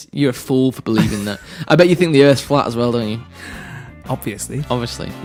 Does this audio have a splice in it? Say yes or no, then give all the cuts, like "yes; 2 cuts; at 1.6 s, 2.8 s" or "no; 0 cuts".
no; 0 cuts